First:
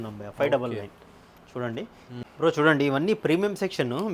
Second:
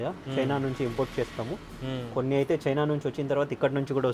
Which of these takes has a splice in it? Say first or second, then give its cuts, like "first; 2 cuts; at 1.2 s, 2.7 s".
first; 1 cut; at 2.2 s